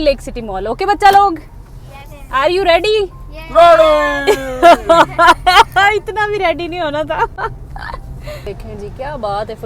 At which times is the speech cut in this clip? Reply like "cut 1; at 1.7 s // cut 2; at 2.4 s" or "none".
none